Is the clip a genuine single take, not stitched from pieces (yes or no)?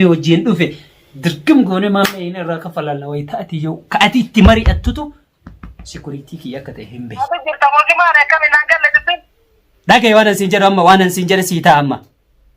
no